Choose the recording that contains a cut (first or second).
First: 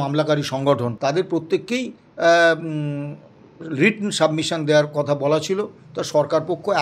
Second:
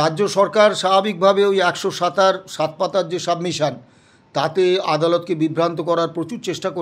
first